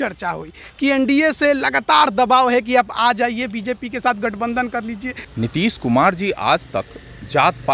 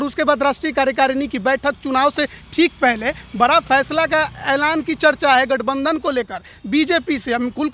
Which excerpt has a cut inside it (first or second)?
first